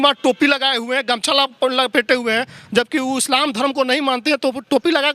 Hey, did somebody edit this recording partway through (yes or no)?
no